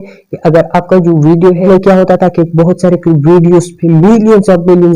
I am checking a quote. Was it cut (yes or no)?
yes